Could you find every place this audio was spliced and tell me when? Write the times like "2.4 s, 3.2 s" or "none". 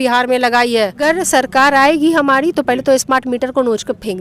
1.0 s

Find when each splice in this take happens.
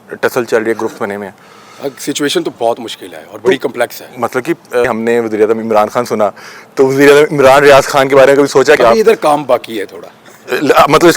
4.9 s, 8.8 s

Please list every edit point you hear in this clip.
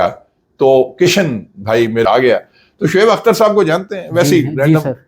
2.0 s

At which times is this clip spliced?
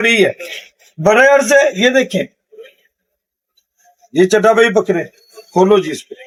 none

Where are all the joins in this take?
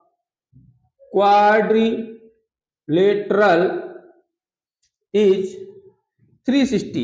none

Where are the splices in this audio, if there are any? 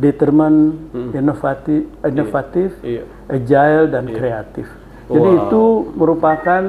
none

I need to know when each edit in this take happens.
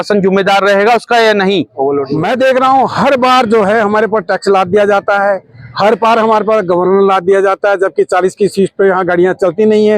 2.1 s

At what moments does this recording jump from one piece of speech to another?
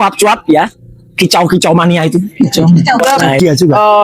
3.0 s

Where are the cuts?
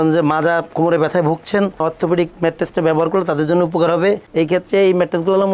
none

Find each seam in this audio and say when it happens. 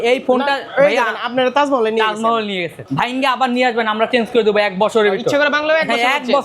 2.8 s

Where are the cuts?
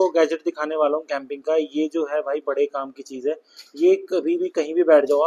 none

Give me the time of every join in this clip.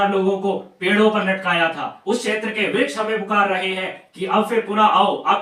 none

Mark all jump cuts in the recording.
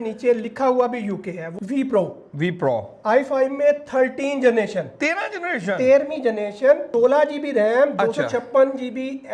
1.5 s, 6.9 s

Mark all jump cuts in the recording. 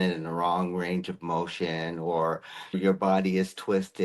2.8 s

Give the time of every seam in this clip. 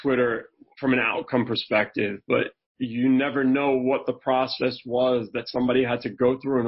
none

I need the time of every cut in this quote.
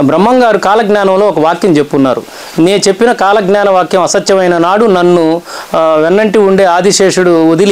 none

